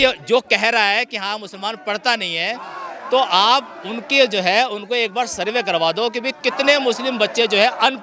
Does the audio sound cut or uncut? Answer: uncut